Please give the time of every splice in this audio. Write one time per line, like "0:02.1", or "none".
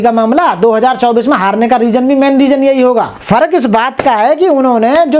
0:03.1